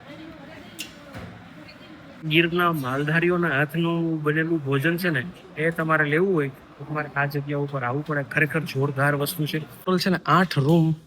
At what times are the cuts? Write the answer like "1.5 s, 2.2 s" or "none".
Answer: 2.3 s, 9.7 s

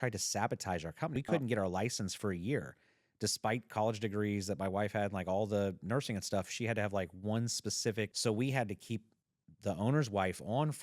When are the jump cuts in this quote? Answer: 1.2 s, 8.1 s

